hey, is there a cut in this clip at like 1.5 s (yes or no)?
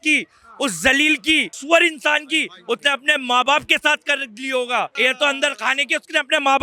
yes